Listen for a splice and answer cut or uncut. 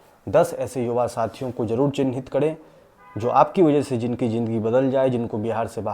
uncut